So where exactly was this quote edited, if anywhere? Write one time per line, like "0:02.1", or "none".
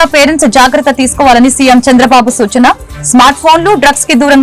none